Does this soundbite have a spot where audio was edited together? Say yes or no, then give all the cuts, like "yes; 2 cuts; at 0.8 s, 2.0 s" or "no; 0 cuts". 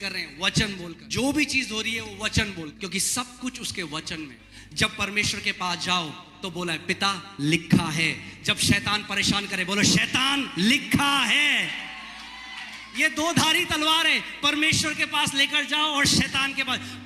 yes; 3 cuts; at 1.0 s, 2.7 s, 4.4 s